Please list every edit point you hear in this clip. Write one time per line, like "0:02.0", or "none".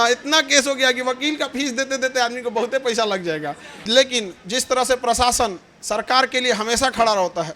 0:03.7